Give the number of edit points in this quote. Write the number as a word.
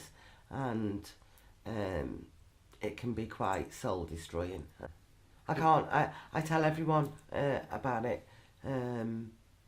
one